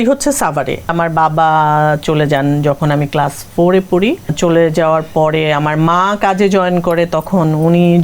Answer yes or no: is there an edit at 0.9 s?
yes